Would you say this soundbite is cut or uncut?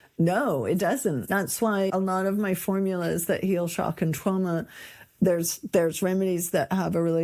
cut